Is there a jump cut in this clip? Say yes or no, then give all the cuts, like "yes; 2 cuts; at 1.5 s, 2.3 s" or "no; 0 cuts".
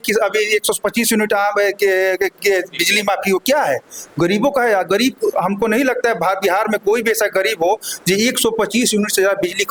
no; 0 cuts